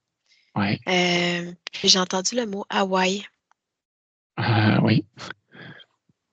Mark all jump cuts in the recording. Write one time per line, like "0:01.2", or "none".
none